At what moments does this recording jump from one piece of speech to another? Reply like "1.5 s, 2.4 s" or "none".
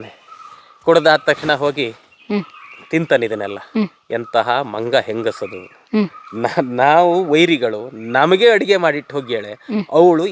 none